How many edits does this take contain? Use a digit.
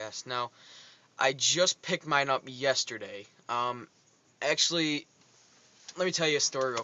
1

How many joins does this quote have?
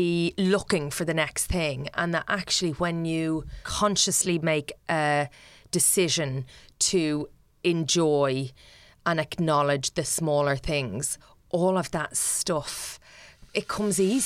2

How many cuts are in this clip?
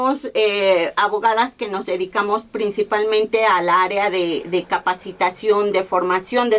0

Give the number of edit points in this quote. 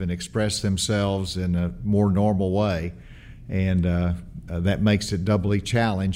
0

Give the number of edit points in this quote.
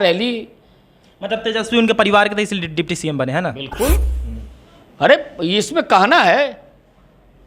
0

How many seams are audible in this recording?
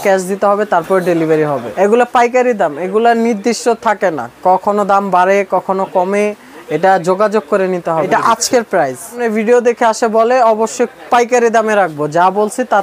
3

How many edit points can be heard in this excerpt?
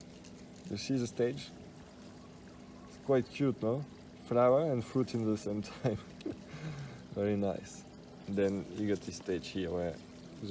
0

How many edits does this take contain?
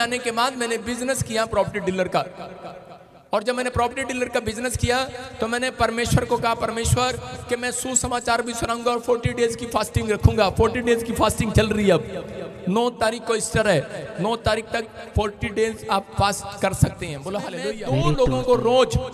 1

